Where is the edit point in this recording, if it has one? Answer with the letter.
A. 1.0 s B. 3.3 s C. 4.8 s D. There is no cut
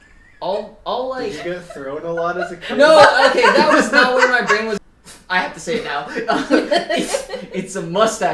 C